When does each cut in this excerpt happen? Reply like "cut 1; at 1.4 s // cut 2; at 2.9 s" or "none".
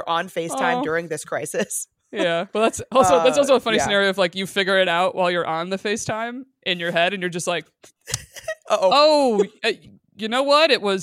cut 1; at 2.5 s